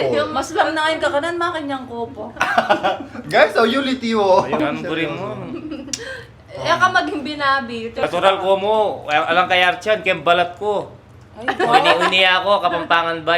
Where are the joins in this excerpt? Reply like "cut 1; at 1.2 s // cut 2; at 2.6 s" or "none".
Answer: cut 1; at 4.6 s // cut 2; at 8.0 s

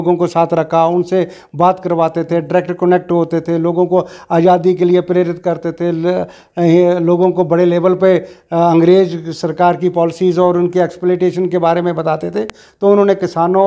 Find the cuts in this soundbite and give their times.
none

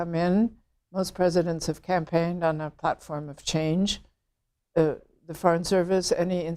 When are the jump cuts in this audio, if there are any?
none

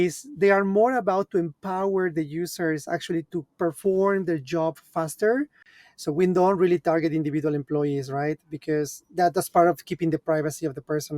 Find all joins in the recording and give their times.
cut 1; at 5.7 s

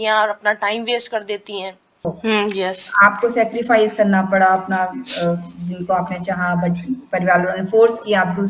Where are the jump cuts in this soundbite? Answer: cut 1; at 2.1 s

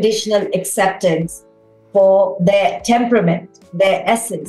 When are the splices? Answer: none

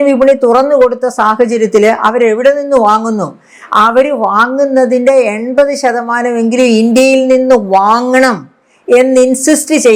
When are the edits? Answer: none

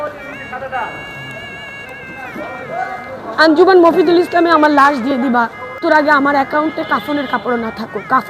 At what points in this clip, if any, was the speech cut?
cut 1; at 5.8 s

